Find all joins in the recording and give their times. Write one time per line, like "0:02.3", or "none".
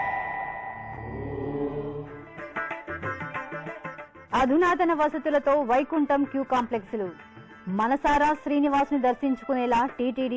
0:04.2